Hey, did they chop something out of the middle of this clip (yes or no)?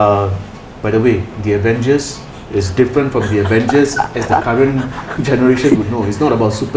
no